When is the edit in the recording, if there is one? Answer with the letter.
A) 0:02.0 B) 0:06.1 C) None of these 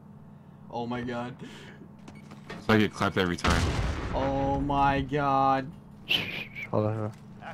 A